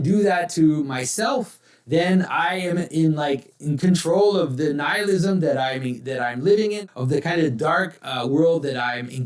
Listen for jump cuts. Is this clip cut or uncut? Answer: cut